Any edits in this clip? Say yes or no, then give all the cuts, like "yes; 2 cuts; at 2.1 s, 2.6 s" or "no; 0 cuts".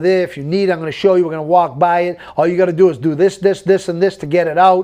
no; 0 cuts